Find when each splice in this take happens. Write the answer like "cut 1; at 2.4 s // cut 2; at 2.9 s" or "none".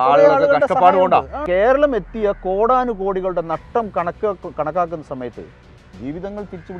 cut 1; at 1.4 s